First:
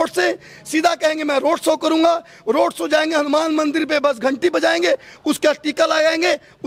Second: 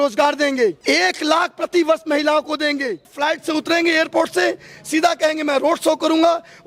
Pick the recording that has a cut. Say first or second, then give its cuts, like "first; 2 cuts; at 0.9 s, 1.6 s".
second; 2 cuts; at 0.8 s, 3.1 s